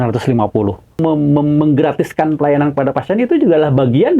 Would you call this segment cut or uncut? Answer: cut